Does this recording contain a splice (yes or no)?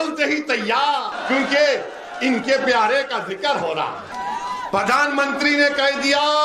yes